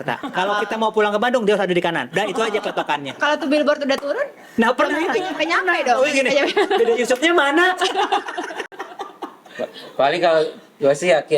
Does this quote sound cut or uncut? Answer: uncut